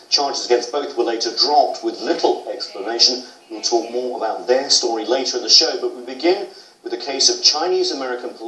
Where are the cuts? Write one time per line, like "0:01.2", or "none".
none